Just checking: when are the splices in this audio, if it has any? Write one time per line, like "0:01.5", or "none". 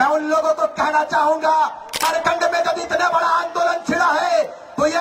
0:02.0